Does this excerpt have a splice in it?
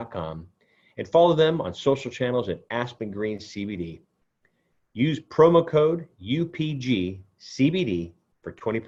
no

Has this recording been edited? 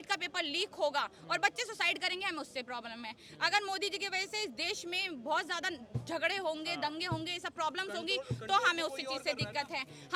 no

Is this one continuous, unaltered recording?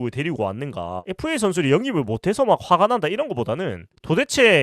no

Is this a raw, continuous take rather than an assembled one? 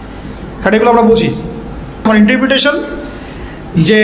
no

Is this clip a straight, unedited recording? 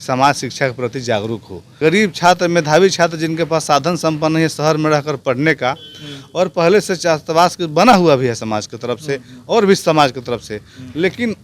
no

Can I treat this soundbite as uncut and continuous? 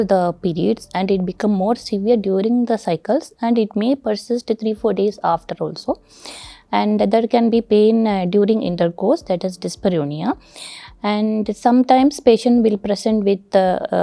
yes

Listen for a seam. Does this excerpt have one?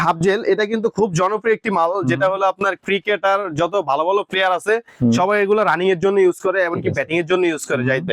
no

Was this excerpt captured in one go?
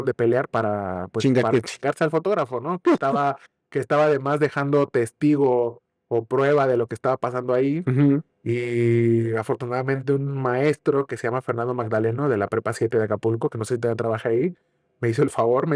yes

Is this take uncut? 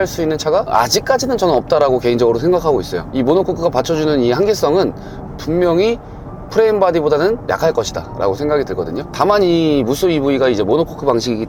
yes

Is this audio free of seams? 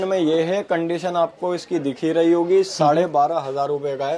yes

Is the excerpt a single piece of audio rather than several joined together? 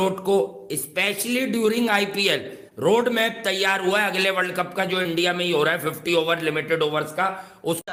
yes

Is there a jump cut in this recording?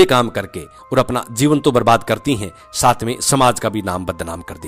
no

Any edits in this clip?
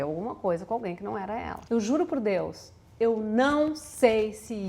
yes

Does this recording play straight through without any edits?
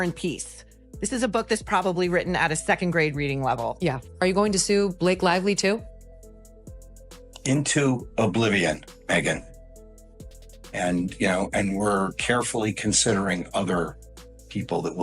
no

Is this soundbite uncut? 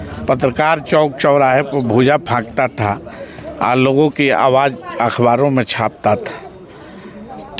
yes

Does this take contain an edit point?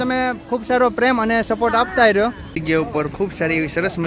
yes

